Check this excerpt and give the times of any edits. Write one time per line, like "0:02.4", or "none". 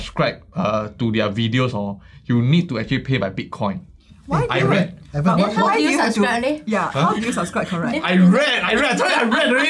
none